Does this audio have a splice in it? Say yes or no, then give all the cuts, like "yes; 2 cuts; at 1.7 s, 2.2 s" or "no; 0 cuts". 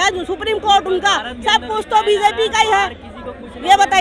no; 0 cuts